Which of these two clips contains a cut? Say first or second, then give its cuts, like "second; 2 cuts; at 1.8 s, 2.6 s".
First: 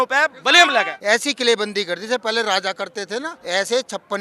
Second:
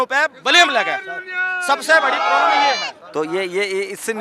first; 2 cuts; at 0.9 s, 3.4 s